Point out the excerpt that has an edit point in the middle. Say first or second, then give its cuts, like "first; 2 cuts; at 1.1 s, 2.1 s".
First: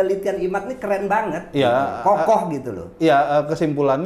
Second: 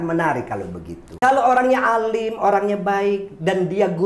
second; 1 cut; at 1.1 s